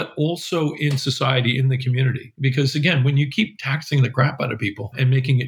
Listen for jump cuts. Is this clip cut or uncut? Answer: uncut